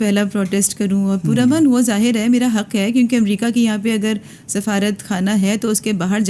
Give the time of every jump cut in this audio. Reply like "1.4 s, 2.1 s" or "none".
none

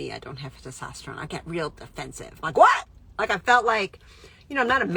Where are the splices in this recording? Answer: none

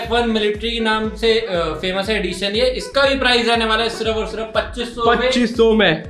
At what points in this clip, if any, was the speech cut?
none

